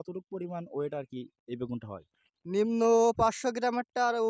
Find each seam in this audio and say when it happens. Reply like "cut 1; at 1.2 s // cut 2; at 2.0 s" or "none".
none

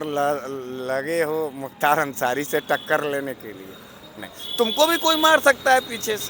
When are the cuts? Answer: none

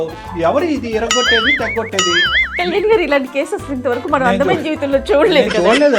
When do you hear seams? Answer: none

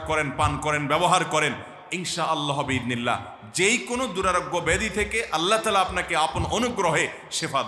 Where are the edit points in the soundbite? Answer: none

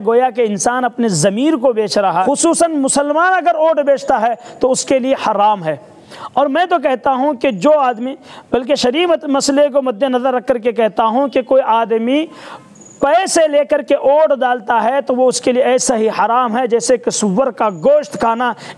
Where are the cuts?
cut 1; at 2.2 s

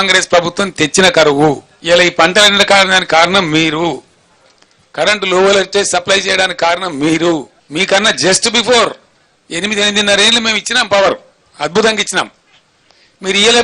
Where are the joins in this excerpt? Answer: cut 1; at 1.7 s // cut 2; at 7.6 s

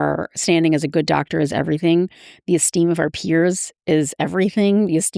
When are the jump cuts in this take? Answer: none

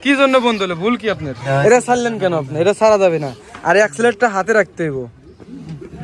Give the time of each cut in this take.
cut 1; at 1.3 s

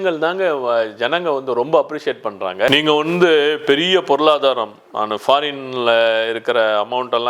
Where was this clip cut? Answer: none

